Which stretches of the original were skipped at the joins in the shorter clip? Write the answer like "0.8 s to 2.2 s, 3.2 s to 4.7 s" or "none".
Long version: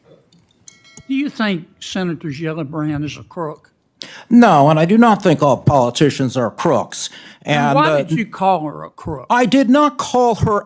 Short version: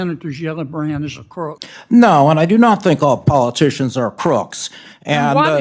3.7 s to 4.1 s